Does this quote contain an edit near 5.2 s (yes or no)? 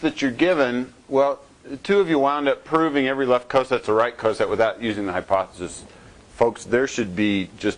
yes